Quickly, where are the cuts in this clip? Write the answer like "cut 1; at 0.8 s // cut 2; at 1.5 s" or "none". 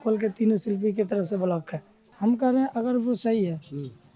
cut 1; at 2.1 s